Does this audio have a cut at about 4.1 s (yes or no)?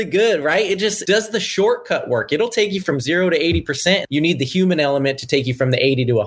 yes